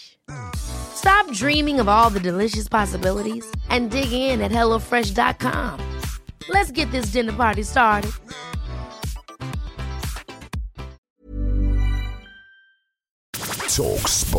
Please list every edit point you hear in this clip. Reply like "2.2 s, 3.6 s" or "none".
11.0 s, 13.3 s